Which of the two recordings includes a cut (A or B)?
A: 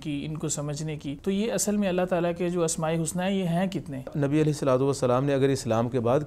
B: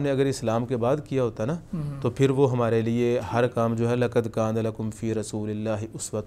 A